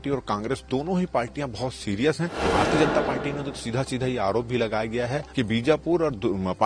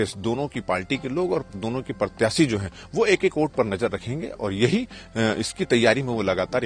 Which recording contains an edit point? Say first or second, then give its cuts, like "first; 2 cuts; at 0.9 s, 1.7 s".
first; 2 cuts; at 2.4 s, 5.2 s